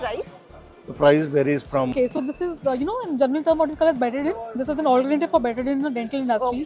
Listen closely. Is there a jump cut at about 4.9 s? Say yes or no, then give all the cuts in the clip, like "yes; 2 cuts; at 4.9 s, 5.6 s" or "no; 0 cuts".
no; 1 cut; at 1.9 s